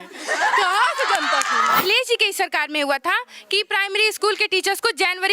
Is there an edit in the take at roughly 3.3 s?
no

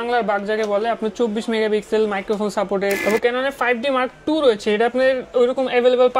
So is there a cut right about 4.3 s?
no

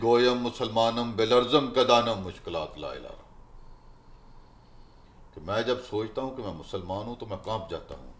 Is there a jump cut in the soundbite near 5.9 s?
no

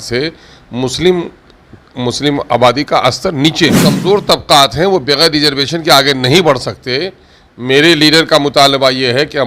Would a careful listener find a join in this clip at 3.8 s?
yes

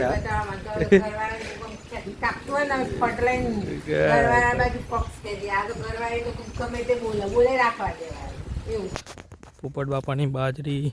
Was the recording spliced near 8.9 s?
yes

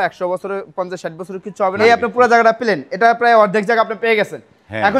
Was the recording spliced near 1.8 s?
yes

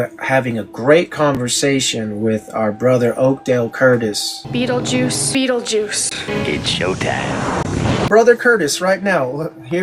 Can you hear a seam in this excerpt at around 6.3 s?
yes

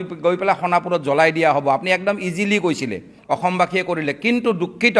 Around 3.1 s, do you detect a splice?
yes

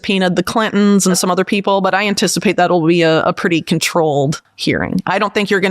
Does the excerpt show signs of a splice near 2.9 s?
no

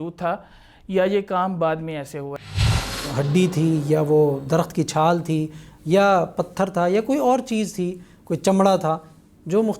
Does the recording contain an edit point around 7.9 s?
no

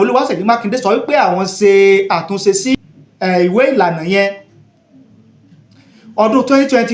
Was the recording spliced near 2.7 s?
yes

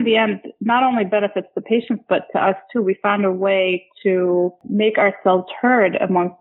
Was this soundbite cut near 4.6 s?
yes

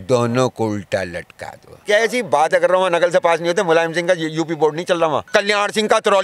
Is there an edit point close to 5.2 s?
yes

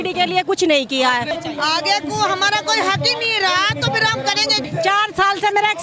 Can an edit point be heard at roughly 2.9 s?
no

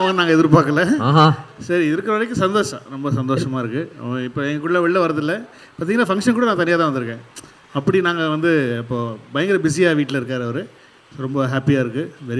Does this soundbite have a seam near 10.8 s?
no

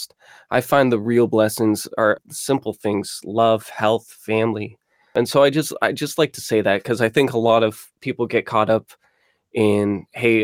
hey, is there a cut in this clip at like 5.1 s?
yes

